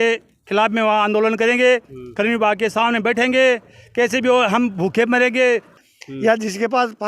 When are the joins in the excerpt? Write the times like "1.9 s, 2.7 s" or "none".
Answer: 5.7 s

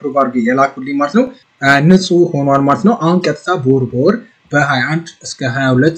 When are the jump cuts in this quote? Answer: 1.4 s

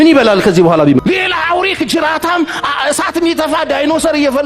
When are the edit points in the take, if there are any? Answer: 1.0 s

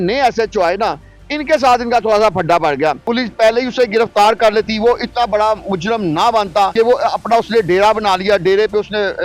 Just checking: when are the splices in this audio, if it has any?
3.0 s, 6.7 s

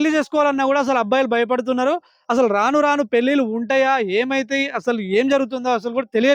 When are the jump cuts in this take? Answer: none

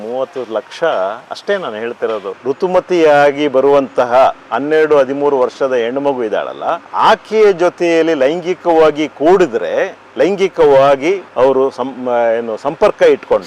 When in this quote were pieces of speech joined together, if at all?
2.3 s

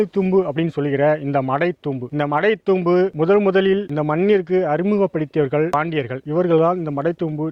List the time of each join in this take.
none

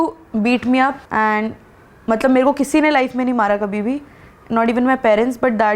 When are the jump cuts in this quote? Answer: 1.0 s

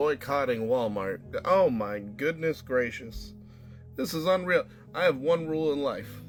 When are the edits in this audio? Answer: none

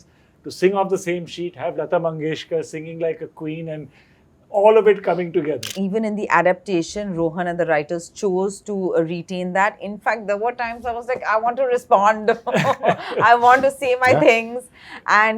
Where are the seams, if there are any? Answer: 5.7 s

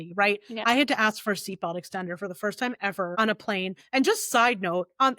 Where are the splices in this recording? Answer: 3.1 s

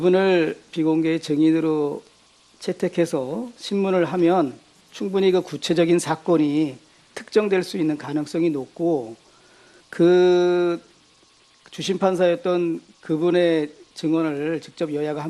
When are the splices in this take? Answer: 8.1 s

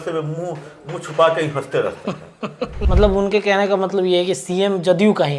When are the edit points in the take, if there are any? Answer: 2.8 s

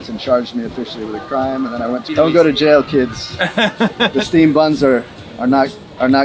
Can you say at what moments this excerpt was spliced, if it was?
2.0 s

